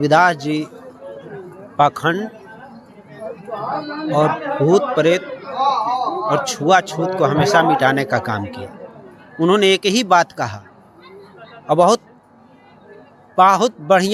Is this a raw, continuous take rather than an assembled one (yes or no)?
yes